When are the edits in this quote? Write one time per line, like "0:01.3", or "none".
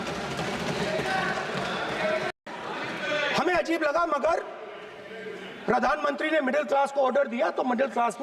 0:02.3